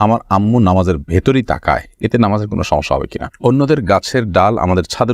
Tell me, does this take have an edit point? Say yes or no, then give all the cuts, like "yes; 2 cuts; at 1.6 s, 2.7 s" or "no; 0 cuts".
yes; 1 cut; at 3.3 s